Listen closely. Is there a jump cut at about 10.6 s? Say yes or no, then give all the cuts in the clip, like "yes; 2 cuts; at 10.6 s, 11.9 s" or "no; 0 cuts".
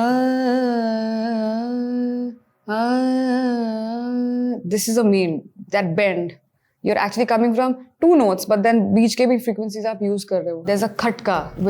yes; 1 cut; at 10.6 s